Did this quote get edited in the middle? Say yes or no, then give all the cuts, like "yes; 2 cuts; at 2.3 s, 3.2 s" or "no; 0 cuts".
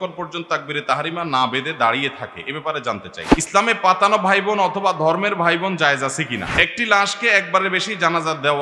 yes; 2 cuts; at 3.2 s, 6.5 s